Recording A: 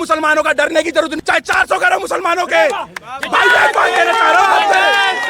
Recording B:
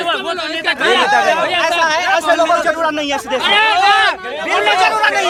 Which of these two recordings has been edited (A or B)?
A